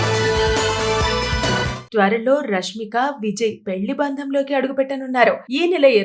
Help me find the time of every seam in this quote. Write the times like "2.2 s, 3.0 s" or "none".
none